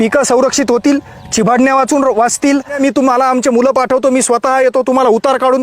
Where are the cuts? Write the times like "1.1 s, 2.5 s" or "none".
2.8 s